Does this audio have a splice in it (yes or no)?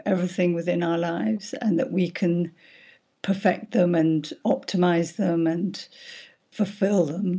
yes